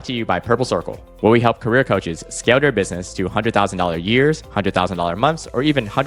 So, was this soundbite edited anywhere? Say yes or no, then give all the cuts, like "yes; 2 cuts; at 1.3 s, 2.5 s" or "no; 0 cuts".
no; 0 cuts